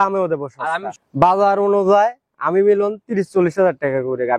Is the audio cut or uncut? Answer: cut